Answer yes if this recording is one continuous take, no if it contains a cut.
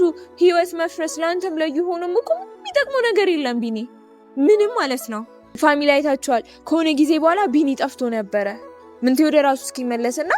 no